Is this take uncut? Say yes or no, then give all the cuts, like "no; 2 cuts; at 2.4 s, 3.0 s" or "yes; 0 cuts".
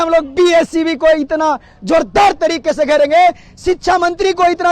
yes; 0 cuts